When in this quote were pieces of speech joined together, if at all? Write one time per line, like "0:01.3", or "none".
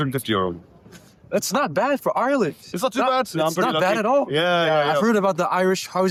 none